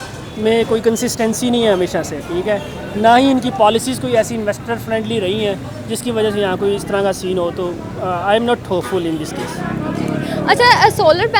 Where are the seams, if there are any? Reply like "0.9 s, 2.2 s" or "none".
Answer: none